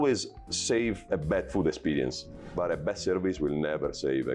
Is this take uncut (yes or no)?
no